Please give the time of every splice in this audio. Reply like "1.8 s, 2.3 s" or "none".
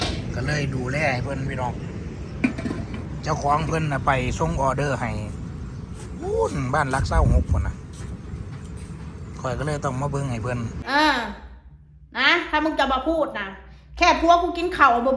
10.8 s